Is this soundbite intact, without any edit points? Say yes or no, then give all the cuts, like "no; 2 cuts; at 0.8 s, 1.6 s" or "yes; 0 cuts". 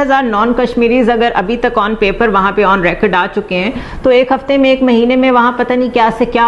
yes; 0 cuts